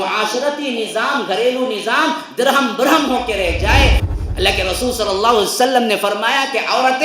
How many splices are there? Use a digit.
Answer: 1